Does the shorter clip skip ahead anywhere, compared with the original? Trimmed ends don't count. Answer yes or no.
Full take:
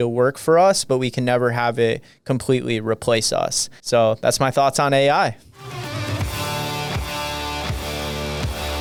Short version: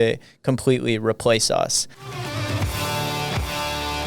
yes